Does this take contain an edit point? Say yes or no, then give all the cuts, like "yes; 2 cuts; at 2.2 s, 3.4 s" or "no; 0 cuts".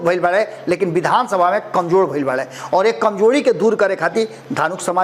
no; 0 cuts